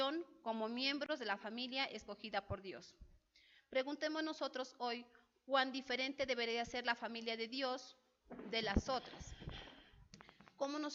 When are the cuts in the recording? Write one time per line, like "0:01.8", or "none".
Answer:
none